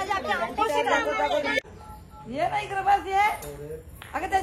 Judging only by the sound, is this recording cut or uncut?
cut